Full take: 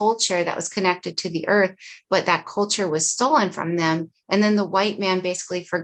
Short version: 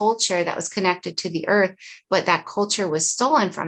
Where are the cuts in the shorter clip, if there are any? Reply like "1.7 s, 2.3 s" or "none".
none